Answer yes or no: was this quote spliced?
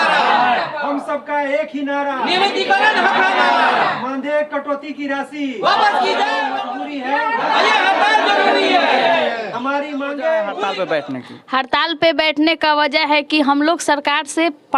yes